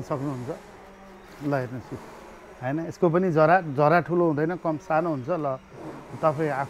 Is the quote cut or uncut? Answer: uncut